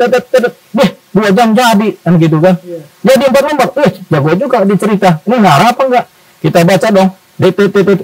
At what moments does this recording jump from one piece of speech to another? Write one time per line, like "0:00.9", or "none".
none